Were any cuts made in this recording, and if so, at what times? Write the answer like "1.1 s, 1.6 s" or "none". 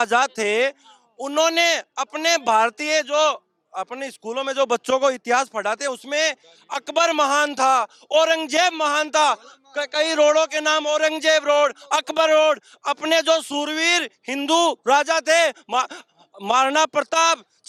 none